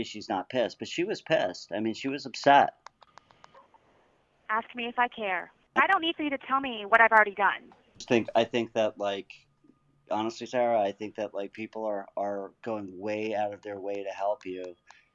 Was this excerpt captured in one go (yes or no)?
no